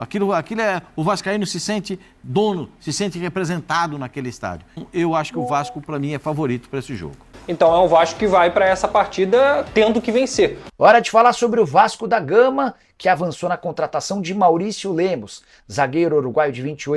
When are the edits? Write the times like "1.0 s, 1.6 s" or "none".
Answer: 4.8 s, 7.2 s, 10.6 s